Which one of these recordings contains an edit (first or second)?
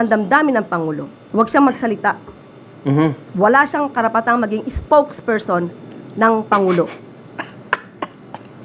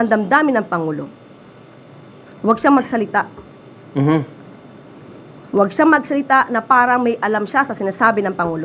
first